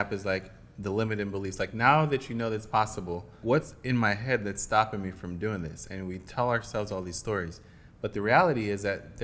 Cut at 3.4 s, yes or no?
yes